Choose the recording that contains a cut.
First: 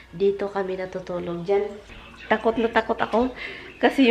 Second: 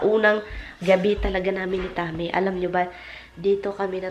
first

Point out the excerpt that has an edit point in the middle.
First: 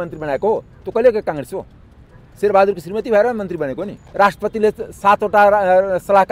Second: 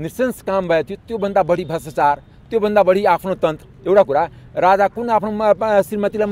first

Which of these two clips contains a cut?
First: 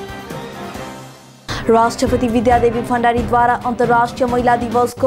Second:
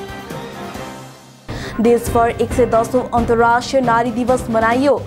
second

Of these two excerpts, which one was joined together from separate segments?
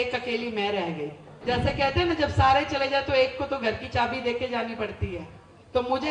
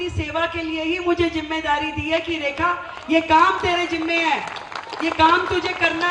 first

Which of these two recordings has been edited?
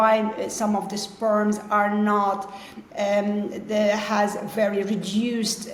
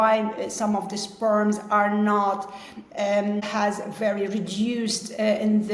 second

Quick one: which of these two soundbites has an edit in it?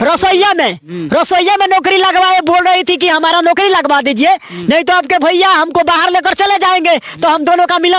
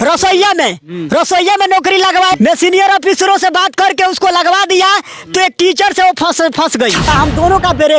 second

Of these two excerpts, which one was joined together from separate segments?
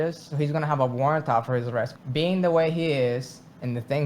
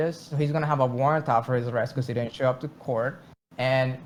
first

